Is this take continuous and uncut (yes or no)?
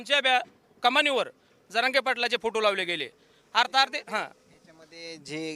yes